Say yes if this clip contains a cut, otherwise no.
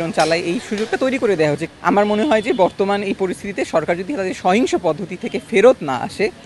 yes